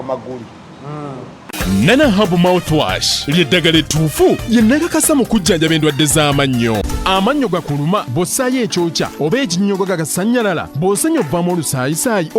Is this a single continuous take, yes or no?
no